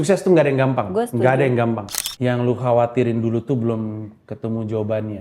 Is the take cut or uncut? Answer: cut